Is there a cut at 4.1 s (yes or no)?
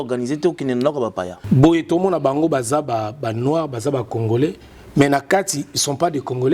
no